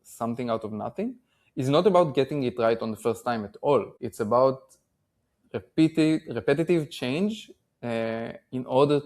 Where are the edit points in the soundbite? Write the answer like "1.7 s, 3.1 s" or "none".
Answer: 4.0 s